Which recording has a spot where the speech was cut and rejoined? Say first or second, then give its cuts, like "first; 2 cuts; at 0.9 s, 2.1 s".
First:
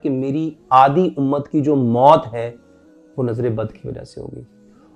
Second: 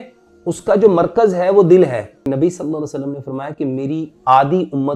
second; 1 cut; at 2.3 s